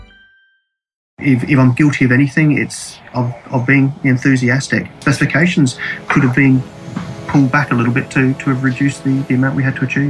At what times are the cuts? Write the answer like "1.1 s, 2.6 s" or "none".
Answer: 1.1 s